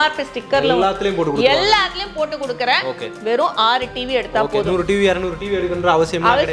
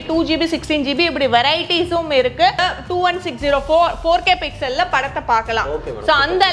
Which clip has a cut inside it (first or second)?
second